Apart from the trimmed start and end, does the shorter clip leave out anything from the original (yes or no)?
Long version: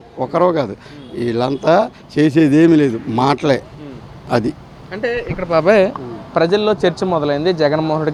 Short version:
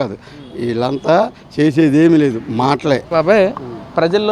yes